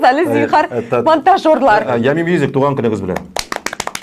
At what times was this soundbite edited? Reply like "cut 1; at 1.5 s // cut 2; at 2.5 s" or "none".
cut 1; at 1.9 s